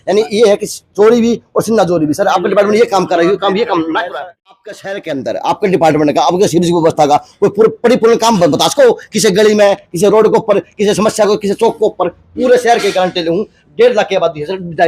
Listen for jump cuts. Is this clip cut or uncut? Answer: cut